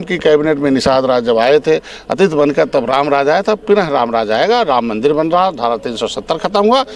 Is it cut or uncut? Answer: uncut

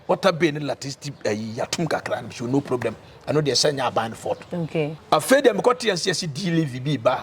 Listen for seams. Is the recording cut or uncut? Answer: cut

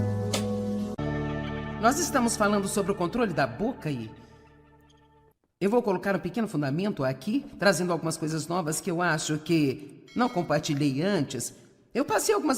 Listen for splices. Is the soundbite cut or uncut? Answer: cut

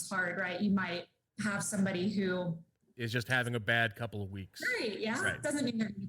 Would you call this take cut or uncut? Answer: uncut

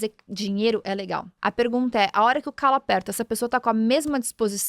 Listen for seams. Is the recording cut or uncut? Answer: cut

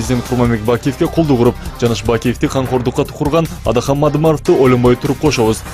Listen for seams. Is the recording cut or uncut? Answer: cut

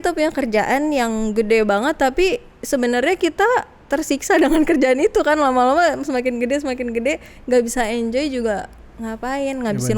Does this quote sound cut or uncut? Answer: uncut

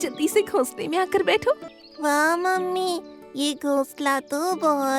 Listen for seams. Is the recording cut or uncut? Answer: cut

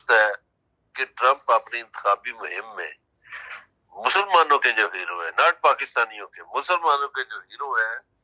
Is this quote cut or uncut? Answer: uncut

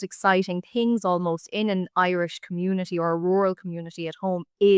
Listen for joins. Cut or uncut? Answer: uncut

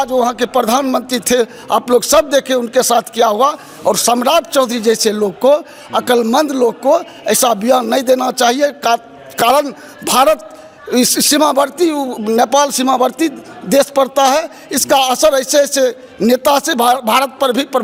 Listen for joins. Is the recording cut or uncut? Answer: uncut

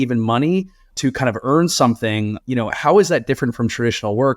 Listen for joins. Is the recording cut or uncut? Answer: cut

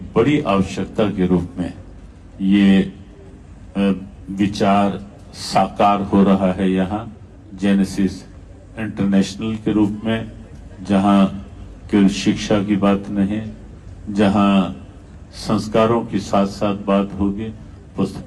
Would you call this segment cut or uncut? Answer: uncut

